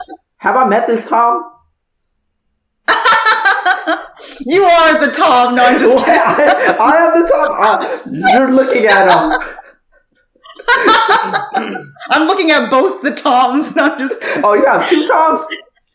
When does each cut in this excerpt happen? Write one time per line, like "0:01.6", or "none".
none

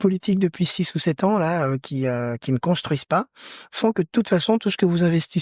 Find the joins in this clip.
none

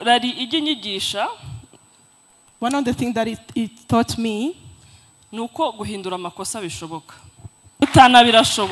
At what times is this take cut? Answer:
0:07.8

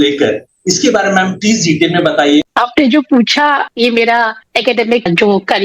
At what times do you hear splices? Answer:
0:02.5

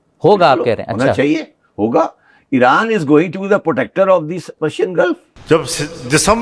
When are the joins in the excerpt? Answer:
0:05.3

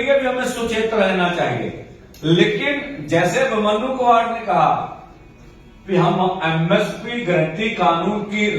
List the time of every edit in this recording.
none

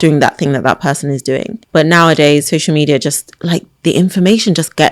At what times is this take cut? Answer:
0:01.6

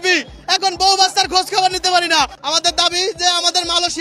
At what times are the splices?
0:02.4

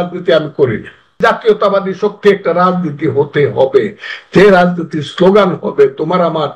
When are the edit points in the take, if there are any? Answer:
0:01.2

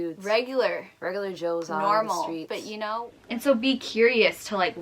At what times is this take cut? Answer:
0:03.0

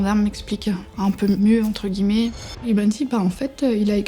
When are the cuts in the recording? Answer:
0:01.4
0:02.6

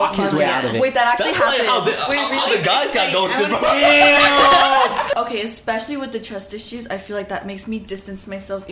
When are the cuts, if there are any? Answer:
0:05.1

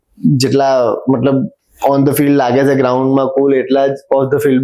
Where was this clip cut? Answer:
none

